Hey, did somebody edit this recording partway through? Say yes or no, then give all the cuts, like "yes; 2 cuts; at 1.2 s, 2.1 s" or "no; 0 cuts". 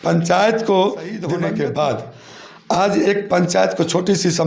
yes; 1 cut; at 1.3 s